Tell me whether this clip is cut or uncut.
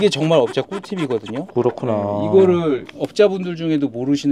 uncut